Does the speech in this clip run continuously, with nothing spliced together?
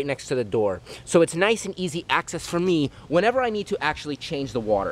yes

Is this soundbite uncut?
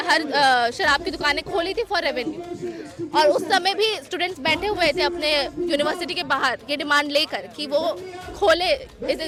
yes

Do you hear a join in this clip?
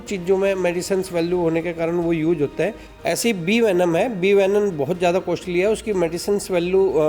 yes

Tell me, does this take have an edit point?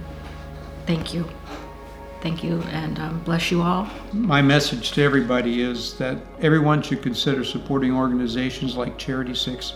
no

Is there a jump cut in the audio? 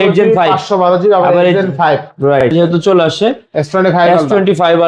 yes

